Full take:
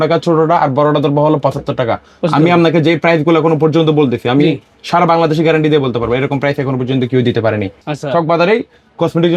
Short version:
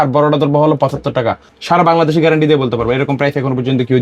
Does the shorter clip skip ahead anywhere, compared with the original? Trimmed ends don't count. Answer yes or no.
yes